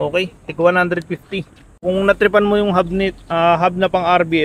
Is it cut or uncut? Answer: cut